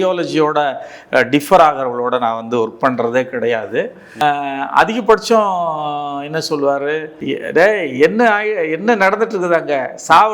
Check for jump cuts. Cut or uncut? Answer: cut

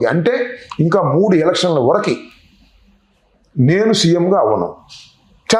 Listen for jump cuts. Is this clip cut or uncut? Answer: uncut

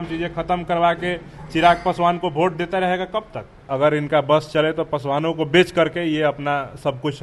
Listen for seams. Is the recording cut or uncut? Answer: cut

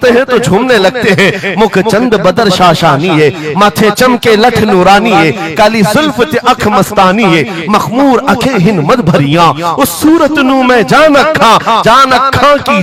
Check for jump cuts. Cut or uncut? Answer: uncut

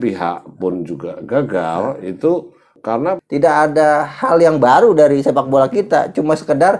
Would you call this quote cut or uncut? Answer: cut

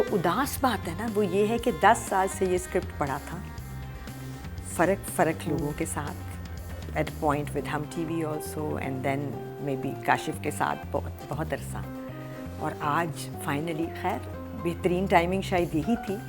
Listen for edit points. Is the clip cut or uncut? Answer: uncut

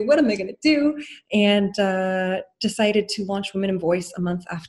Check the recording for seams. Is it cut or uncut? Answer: cut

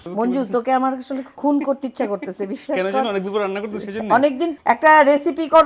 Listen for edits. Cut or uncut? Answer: cut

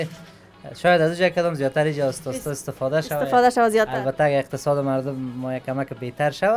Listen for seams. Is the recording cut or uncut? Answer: uncut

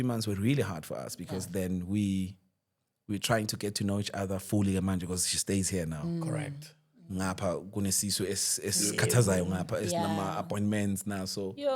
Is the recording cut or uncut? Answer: uncut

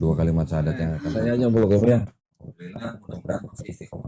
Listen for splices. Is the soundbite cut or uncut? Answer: cut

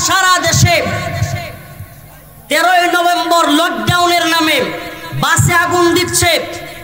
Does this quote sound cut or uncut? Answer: uncut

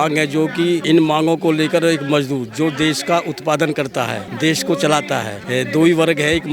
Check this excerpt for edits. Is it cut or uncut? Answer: cut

